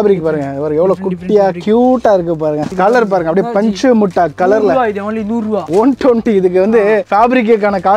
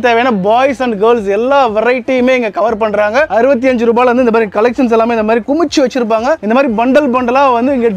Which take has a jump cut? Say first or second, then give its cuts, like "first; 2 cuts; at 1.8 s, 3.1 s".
first; 2 cuts; at 2.7 s, 5.6 s